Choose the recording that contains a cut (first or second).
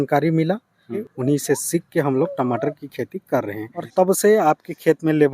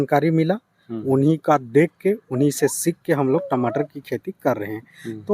first